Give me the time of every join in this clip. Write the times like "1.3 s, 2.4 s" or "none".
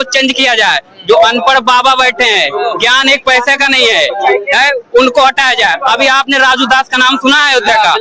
none